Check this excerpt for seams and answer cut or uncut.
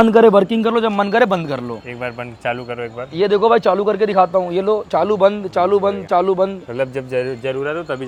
uncut